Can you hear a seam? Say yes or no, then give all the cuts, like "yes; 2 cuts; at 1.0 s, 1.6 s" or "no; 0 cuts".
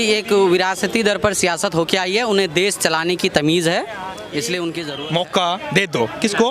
yes; 1 cut; at 4.8 s